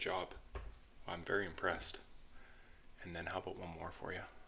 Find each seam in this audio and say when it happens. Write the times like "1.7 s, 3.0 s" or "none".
none